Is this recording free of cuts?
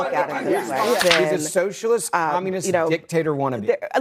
no; 1 cut; at 1.0 s

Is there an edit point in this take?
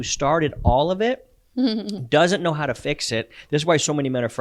no; 0 cuts

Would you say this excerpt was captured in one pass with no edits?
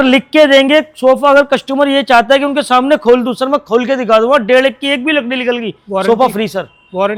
yes; 0 cuts

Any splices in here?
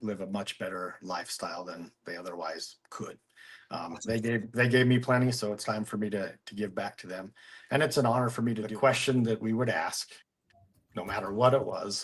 yes; 1 cut; at 8.7 s

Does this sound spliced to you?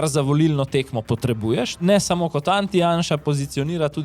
yes; 1 cut; at 1.8 s

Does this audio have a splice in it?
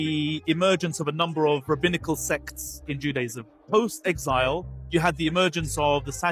no; 0 cuts

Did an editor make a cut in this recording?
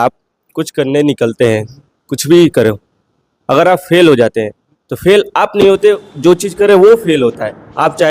no; 0 cuts

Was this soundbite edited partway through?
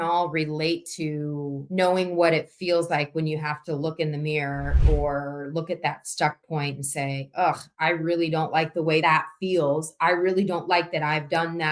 no; 0 cuts

